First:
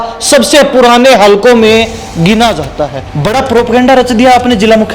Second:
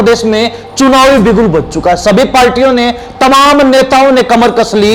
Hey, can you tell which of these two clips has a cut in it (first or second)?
first